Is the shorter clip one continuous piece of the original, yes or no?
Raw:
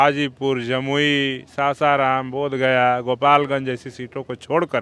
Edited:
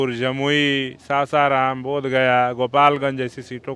yes